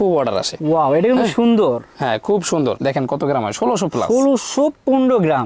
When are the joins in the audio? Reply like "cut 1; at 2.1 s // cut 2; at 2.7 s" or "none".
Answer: cut 1; at 2.8 s